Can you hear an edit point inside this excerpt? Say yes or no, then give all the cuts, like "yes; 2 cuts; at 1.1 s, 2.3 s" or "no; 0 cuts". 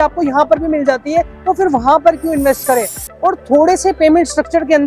yes; 1 cut; at 3.0 s